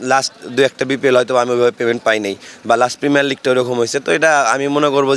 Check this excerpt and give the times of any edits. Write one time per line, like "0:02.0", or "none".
none